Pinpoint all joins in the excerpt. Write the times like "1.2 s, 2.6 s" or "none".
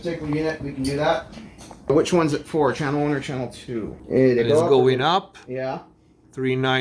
1.9 s, 3.9 s

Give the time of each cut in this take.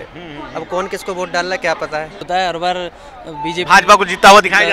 2.2 s

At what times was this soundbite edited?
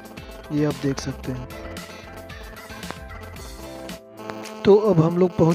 4.0 s

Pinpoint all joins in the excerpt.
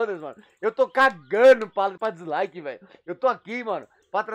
2.0 s

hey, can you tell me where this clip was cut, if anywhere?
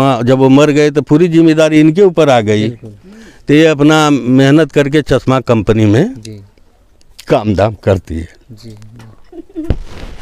none

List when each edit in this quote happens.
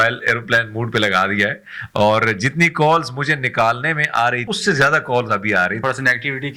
4.5 s, 5.8 s

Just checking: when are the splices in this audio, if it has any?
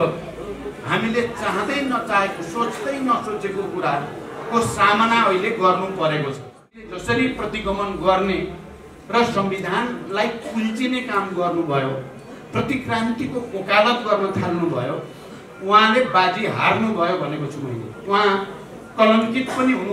6.9 s

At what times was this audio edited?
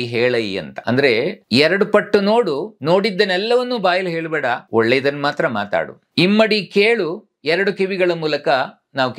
1.1 s, 2.7 s, 4.6 s, 6.0 s

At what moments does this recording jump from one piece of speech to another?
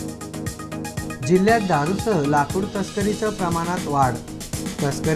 1.0 s

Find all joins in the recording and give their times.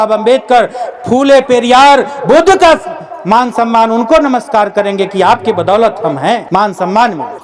none

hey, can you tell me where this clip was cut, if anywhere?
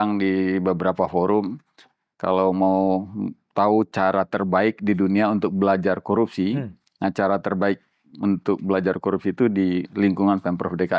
none

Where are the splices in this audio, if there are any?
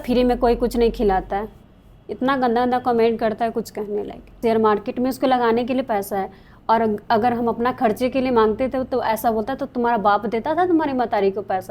4.4 s

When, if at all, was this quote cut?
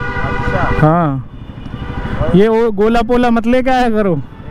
none

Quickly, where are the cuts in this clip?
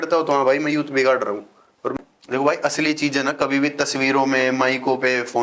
1.9 s

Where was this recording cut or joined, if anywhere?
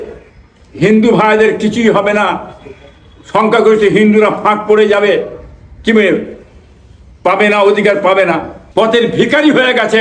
8.6 s

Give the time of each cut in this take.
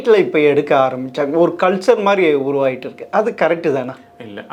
none

